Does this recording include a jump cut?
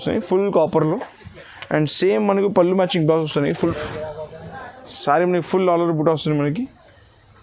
yes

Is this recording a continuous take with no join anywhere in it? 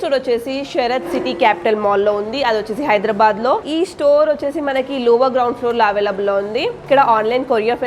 no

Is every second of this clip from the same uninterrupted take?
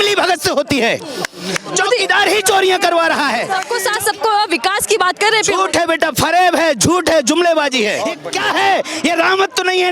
no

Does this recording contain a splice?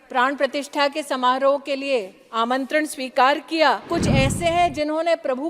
yes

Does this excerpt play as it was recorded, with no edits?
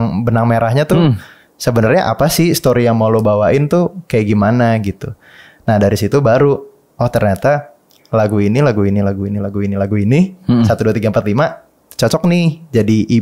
yes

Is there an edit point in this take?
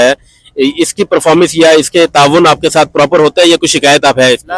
no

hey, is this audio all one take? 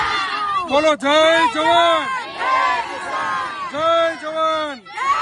yes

